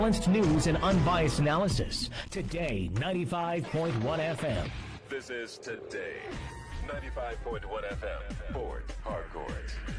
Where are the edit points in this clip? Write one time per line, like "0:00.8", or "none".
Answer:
0:04.9